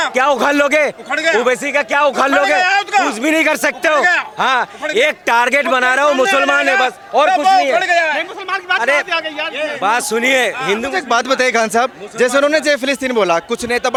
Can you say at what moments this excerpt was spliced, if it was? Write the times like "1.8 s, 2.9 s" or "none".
none